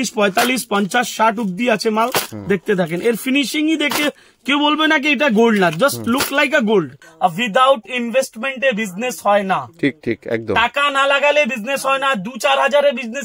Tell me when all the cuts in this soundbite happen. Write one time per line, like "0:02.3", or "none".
0:07.0